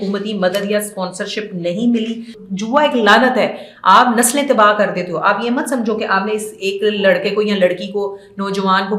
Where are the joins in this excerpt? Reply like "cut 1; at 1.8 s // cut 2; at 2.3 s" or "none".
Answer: cut 1; at 2.4 s